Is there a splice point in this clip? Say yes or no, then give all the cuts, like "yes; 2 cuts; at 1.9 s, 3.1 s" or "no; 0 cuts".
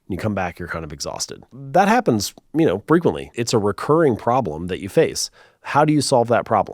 yes; 2 cuts; at 1.6 s, 3.4 s